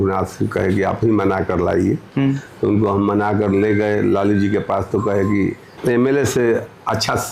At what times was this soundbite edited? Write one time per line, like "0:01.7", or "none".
0:05.7